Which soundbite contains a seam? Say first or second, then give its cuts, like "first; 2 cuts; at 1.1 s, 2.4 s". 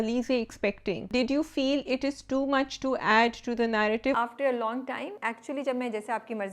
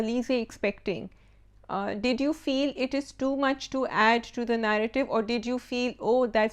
first; 3 cuts; at 1.1 s, 4.2 s, 5.1 s